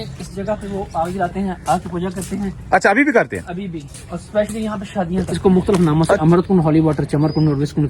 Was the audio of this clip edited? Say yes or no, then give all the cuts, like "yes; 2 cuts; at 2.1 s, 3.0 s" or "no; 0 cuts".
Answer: yes; 1 cut; at 5.3 s